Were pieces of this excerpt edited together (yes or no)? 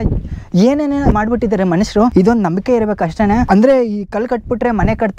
yes